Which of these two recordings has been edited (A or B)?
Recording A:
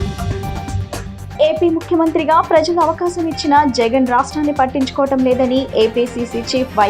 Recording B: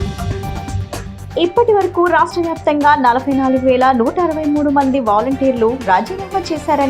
A